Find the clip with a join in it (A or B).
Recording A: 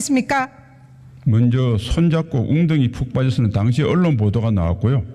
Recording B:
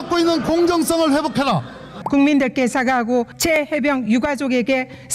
B